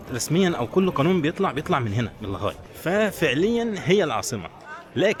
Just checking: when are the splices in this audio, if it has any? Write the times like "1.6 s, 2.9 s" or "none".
none